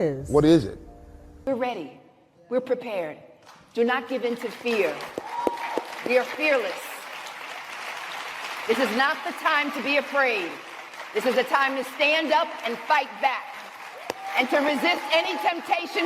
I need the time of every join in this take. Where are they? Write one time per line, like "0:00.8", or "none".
0:01.3